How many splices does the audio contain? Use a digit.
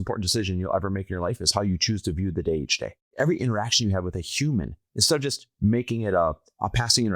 1